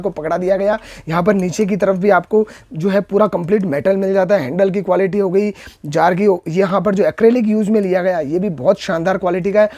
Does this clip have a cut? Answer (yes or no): no